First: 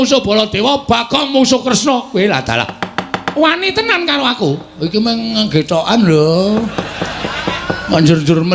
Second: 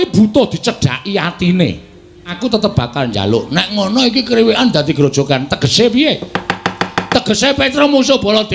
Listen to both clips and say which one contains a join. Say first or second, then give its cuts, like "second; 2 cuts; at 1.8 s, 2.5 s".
second; 1 cut; at 2.3 s